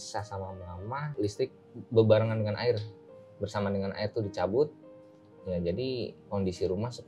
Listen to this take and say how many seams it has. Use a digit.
1